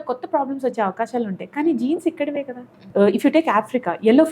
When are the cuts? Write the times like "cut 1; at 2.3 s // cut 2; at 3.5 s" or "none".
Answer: cut 1; at 2.7 s